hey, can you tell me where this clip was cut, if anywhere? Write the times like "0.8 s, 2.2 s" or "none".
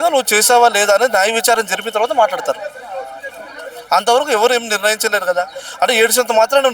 none